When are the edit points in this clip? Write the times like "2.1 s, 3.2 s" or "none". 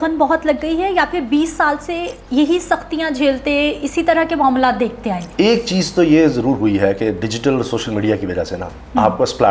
2.1 s, 5.2 s